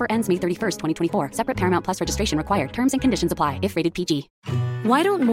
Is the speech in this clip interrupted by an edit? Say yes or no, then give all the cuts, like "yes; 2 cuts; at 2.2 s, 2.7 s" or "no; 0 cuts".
yes; 1 cut; at 4.4 s